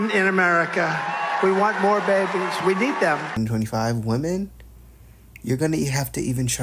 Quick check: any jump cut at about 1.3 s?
no; 1 cut; at 3.3 s

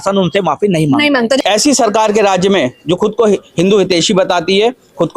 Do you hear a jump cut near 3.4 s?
no; 1 cut; at 1.4 s

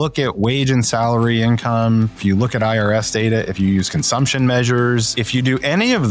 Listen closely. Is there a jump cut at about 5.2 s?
yes; 2 cuts; at 2.2 s, 5.2 s

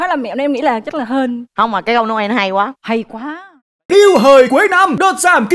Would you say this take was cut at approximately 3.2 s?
yes; 1 cut; at 3.2 s

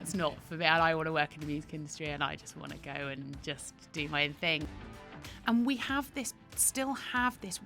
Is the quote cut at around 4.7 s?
yes; 1 cut; at 4.7 s

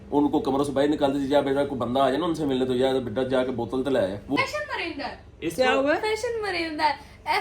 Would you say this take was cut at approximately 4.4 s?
yes; 1 cut; at 4.4 s

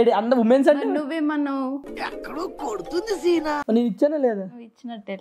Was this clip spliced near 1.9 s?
no; 1 cut; at 3.6 s

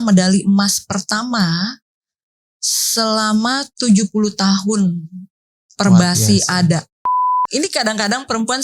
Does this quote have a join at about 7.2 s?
yes; 1 cut; at 7.2 s

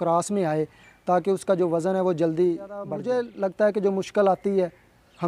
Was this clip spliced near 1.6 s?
no; 1 cut; at 2.9 s

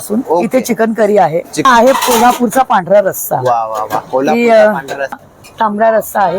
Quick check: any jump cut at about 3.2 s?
no; 2 cuts; at 1.6 s, 5.2 s

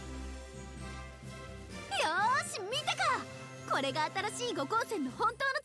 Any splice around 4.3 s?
no; 1 cut; at 1.9 s

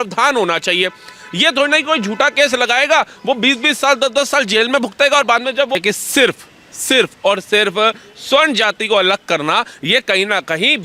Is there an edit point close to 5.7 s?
yes; 1 cut; at 5.7 s

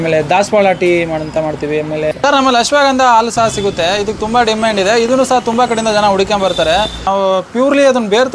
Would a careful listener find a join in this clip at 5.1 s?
no; 2 cuts; at 2.1 s, 7.1 s

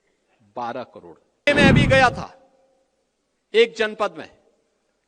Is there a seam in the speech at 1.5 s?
yes; 1 cut; at 1.5 s

